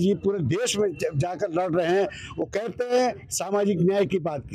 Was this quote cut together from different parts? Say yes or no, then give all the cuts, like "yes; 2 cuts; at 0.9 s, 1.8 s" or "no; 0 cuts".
no; 0 cuts